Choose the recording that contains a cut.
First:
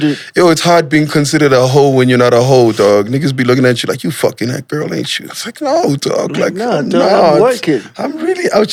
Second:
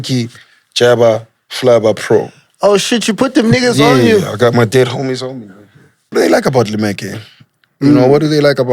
second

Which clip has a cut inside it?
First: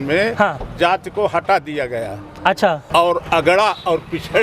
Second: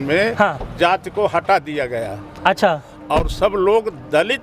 first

